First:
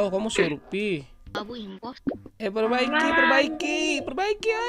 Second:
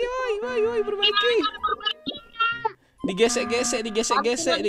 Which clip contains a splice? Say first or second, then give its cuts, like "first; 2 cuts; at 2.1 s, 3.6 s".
first; 1 cut; at 1.4 s